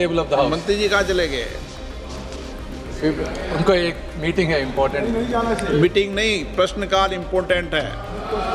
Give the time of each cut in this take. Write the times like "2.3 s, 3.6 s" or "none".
none